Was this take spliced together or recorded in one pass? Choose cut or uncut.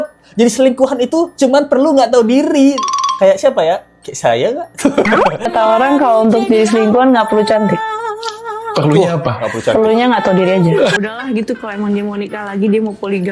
cut